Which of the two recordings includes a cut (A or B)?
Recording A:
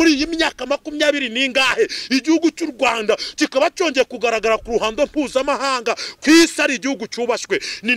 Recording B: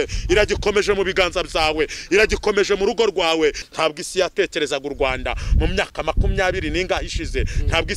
B